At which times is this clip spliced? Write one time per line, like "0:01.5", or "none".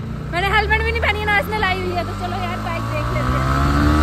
none